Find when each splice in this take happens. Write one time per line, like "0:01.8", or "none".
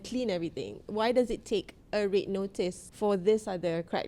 0:02.8